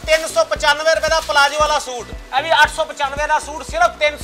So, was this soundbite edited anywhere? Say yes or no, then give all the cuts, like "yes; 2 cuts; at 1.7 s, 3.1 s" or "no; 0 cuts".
yes; 1 cut; at 2.0 s